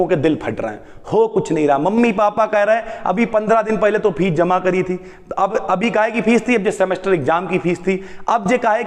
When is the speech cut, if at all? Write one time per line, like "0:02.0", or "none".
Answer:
none